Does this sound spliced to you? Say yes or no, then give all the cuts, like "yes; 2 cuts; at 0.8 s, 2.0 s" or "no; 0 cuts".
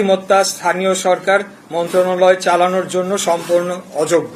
no; 0 cuts